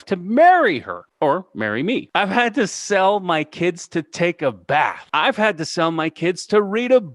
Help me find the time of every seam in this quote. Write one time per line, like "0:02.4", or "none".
0:01.0
0:02.1
0:05.0